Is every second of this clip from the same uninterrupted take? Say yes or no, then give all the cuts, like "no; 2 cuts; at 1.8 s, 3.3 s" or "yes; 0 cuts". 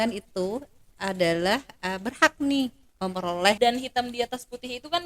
no; 1 cut; at 3.6 s